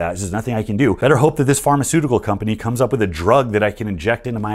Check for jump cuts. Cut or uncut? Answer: cut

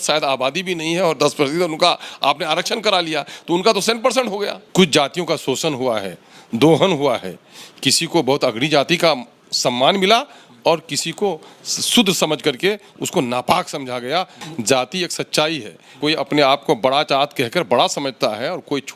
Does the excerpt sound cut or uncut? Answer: cut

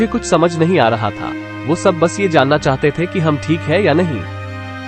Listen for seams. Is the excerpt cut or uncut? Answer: uncut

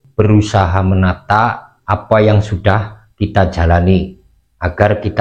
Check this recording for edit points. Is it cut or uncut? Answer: cut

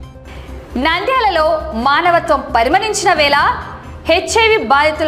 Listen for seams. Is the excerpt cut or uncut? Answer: uncut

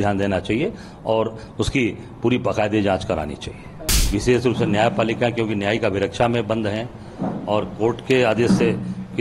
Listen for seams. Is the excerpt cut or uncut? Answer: cut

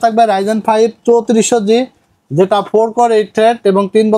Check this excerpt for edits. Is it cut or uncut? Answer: uncut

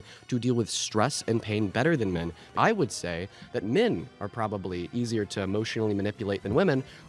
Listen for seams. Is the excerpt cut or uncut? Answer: cut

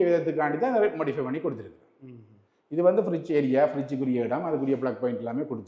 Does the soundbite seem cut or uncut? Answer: uncut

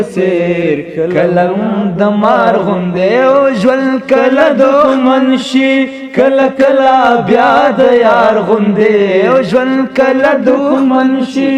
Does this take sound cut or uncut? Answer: uncut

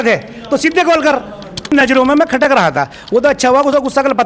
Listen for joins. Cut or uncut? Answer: cut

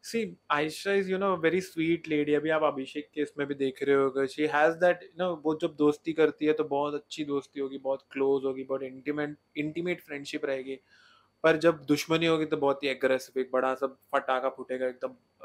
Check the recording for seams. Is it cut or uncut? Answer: uncut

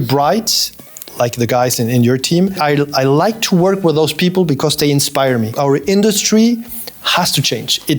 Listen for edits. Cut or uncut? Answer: cut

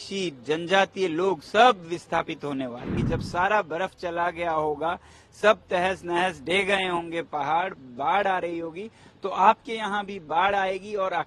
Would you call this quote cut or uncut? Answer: cut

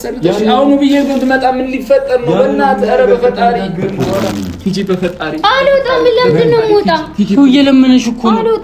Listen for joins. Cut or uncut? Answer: cut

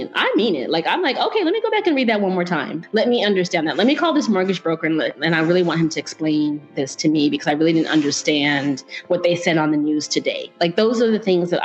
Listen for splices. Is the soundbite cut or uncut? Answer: cut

